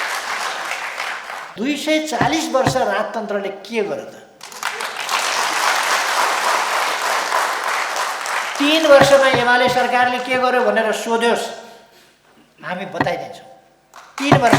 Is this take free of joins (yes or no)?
no